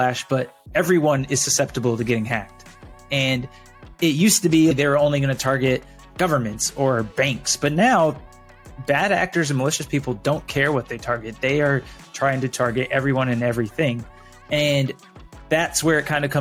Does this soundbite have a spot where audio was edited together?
no; 0 cuts

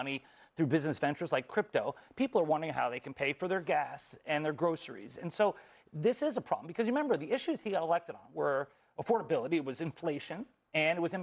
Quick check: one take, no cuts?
yes; 0 cuts

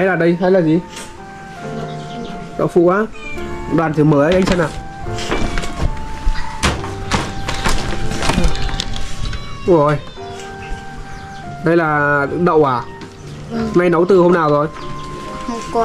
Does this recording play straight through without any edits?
yes; 0 cuts

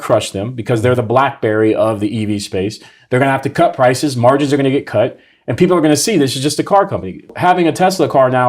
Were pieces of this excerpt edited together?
yes; 1 cut; at 7.2 s

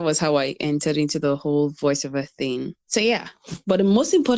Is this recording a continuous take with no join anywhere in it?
yes; 0 cuts

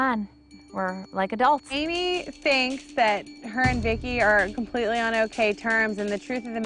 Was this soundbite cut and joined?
yes; 1 cut; at 1.7 s

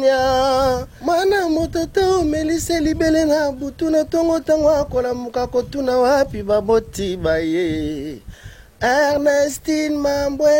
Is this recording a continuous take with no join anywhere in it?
no; 1 cut; at 0.9 s

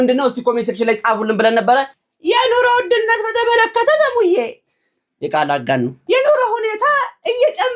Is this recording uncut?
no; 1 cut; at 1.9 s

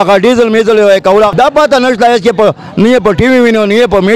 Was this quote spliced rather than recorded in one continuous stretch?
yes; 1 cut; at 1.3 s

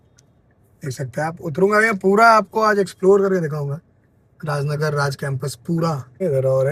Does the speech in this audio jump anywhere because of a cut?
no; 0 cuts

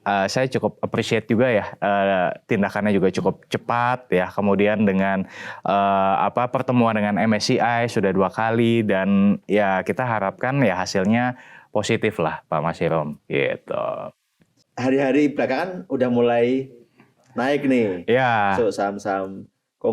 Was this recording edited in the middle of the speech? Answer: no; 0 cuts

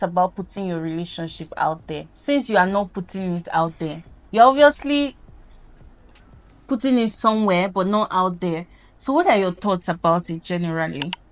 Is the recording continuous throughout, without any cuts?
yes; 0 cuts

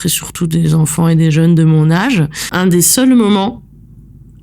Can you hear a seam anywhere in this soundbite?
yes; 1 cut; at 2.4 s

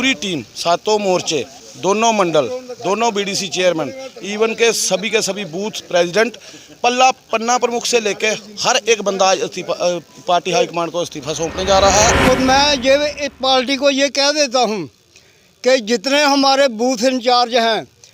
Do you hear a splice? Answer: yes; 2 cuts; at 1.6 s, 12.2 s

